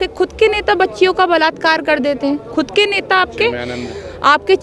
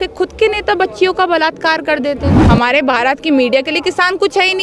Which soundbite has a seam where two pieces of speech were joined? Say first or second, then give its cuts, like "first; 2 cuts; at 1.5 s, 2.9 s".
second; 1 cut; at 2.4 s